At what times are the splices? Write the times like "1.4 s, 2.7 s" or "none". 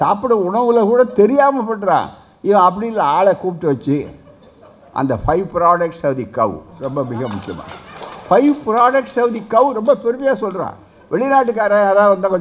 none